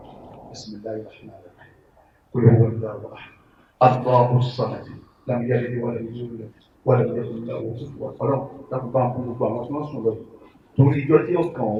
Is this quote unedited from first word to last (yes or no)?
yes